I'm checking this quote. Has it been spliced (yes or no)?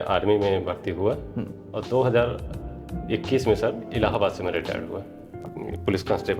yes